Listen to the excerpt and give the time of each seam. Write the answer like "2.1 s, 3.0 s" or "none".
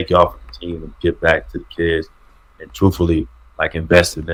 none